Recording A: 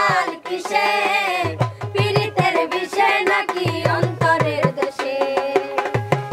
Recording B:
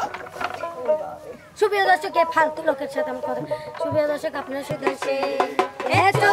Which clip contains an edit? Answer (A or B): B